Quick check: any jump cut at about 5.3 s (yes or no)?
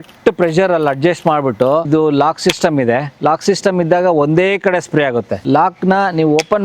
yes